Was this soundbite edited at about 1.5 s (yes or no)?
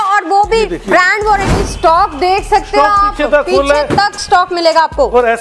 yes